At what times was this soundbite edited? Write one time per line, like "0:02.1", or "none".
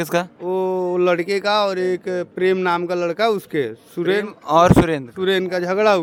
none